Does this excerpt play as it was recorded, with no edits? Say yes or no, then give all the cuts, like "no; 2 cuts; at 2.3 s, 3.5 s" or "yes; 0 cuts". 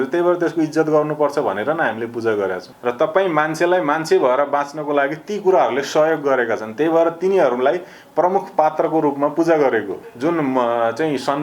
no; 2 cuts; at 2.7 s, 10.0 s